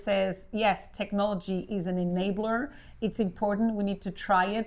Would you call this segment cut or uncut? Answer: uncut